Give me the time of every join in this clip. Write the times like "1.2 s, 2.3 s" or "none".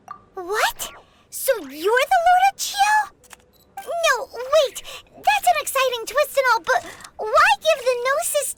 none